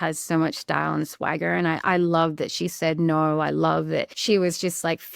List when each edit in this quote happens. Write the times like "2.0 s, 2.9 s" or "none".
4.1 s

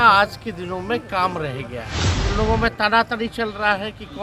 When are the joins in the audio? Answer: 2.0 s

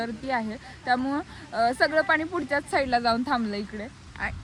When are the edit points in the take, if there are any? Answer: none

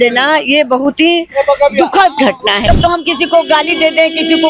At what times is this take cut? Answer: 2.6 s

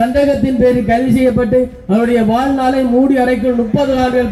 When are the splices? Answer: none

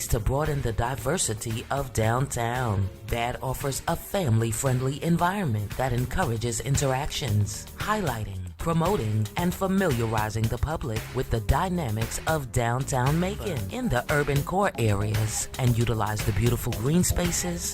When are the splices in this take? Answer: 13.6 s

